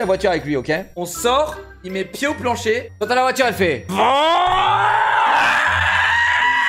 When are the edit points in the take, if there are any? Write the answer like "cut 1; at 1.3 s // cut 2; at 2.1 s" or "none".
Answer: cut 1; at 1.0 s